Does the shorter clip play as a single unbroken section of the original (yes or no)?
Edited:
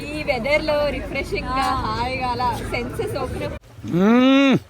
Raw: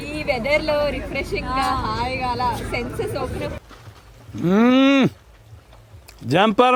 no